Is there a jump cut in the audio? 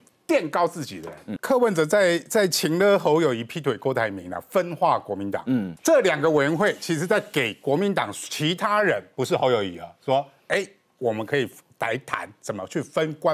yes; 2 cuts; at 1.3 s, 5.7 s

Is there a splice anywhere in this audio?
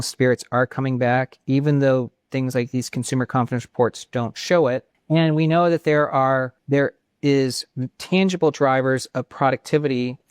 yes; 2 cuts; at 4.9 s, 6.6 s

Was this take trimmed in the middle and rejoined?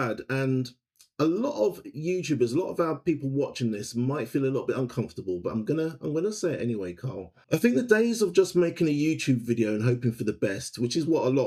no; 0 cuts

